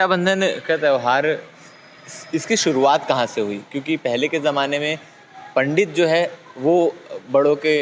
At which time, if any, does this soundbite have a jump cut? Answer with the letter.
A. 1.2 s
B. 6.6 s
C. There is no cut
C